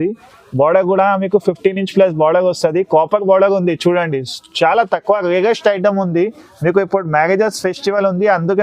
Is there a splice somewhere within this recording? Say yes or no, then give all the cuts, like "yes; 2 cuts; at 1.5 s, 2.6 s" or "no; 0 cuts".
no; 0 cuts